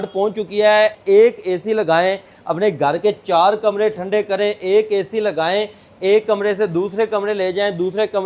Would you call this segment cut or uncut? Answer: cut